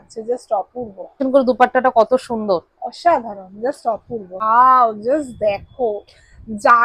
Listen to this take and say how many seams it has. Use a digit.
2